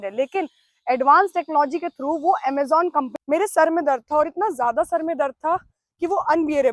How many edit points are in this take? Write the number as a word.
one